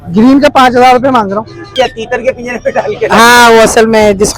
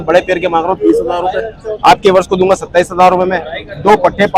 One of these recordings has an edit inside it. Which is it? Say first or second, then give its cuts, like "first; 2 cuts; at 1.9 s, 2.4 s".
first; 1 cut; at 1.7 s